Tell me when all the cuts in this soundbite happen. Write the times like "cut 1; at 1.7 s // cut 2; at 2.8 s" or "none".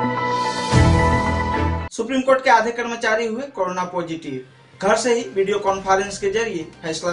cut 1; at 1.6 s